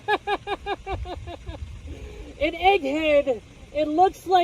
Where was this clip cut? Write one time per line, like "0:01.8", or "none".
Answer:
0:01.9